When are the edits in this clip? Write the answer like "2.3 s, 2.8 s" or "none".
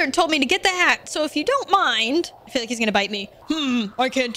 2.4 s, 3.3 s